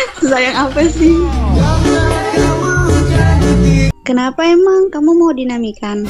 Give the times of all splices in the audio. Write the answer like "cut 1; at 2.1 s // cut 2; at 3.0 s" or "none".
cut 1; at 3.9 s